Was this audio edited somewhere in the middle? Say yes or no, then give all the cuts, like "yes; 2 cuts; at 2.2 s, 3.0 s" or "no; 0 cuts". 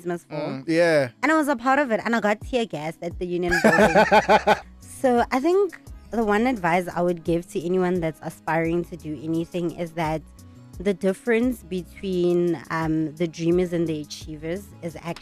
yes; 1 cut; at 4.6 s